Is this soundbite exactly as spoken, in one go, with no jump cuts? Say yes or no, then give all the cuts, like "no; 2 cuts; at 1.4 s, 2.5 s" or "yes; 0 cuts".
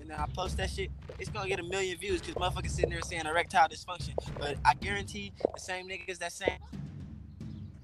no; 1 cut; at 6.6 s